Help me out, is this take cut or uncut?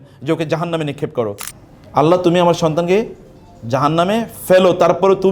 cut